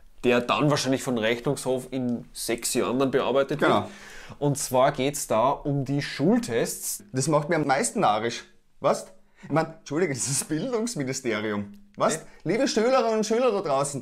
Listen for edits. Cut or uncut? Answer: cut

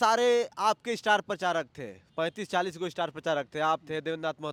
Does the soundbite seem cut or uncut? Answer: uncut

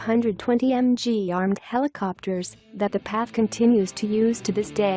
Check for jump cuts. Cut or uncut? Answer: cut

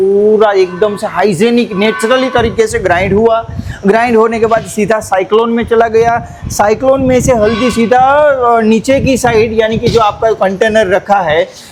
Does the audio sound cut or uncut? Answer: uncut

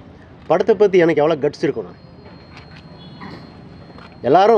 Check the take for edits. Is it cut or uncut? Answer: uncut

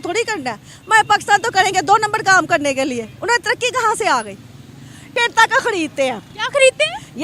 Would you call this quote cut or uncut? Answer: cut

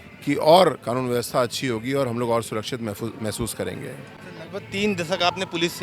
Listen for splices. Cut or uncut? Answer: uncut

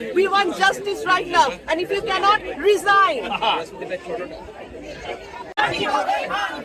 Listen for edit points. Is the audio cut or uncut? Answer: uncut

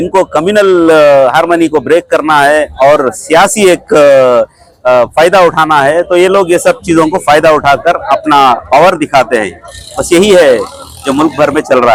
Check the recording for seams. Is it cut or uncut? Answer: uncut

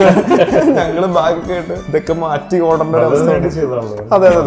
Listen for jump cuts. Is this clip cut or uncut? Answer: cut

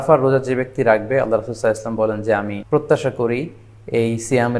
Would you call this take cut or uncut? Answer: cut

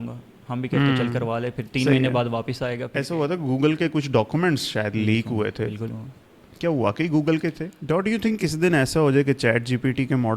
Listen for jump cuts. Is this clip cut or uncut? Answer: cut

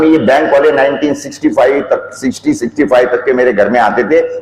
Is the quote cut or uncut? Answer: uncut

